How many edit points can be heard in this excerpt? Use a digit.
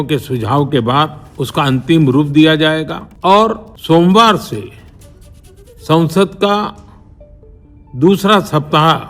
3